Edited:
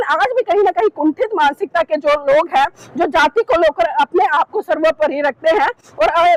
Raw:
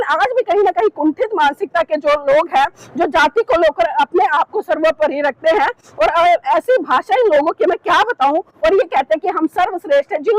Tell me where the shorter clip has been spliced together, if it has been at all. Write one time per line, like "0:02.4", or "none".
none